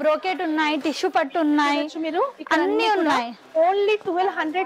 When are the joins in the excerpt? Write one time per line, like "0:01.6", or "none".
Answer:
none